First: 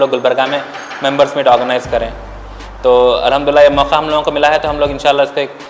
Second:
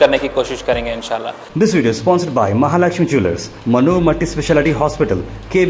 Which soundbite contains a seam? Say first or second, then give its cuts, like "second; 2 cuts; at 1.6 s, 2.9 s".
second; 1 cut; at 1.4 s